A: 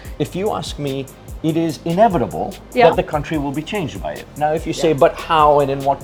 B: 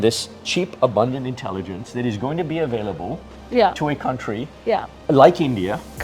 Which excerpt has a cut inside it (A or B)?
B